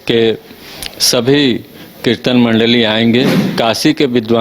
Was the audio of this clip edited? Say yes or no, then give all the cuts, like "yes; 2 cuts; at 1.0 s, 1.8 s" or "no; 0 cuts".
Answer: yes; 1 cut; at 3.4 s